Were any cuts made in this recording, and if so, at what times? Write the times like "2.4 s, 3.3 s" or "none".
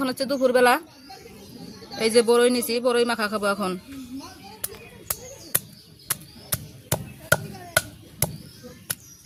none

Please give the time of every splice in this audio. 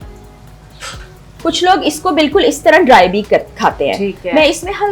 1.3 s

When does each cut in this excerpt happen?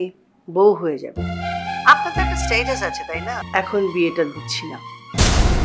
3.4 s

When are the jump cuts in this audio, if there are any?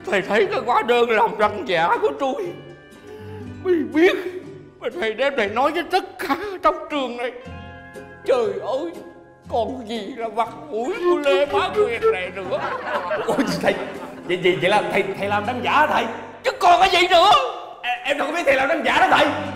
none

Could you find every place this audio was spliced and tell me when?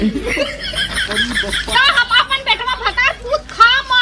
1.7 s

